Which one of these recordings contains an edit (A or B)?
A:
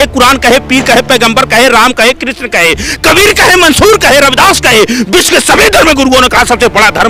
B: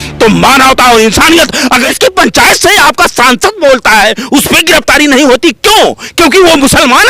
B